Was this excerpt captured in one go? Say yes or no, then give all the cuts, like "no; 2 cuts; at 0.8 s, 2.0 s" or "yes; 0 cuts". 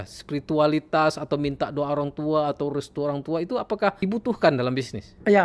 no; 1 cut; at 4.0 s